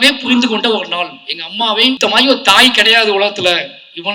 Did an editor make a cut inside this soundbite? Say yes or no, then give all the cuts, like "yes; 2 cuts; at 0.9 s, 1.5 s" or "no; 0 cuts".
yes; 1 cut; at 2.0 s